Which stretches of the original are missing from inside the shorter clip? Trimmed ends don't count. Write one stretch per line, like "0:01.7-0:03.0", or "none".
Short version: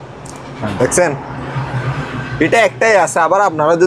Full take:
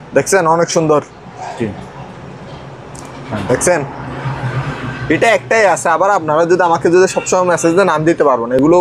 none

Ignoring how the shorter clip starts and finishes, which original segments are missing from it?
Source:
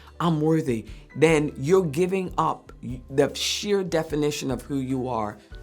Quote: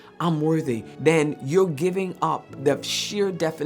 0:00.9-0:01.0
0:02.7-0:03.0

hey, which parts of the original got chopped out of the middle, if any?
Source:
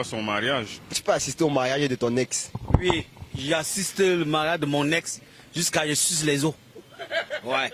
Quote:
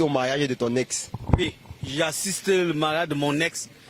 0:02.8-0:02.9

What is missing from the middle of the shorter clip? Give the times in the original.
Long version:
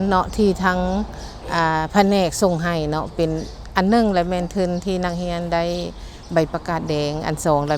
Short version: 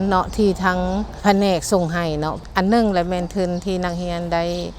0:01.2-0:01.9
0:03.1-0:03.6

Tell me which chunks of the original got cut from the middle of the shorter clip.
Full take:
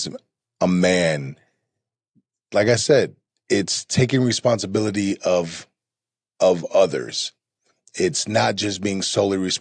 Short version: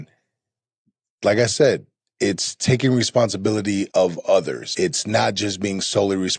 0:05.2-0:06.3
0:07.1-0:07.9

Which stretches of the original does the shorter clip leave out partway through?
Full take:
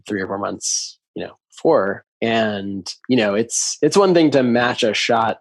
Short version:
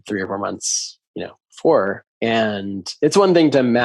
0:02.8-0:03.6

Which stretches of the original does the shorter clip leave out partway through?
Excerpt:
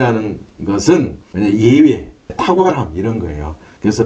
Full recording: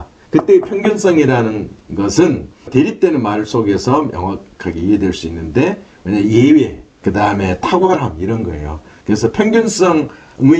0:02.5-0:05.9
0:07.0-0:07.5

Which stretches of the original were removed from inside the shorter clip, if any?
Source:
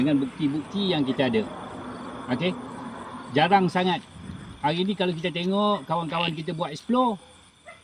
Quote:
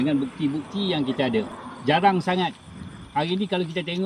0:01.6-0:03.1

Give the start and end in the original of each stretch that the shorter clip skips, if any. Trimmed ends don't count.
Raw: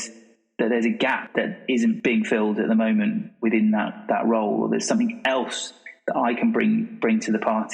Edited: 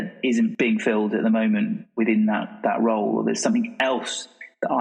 none

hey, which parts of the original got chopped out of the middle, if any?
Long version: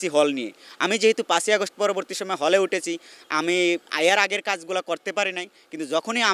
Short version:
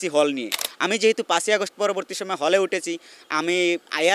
none

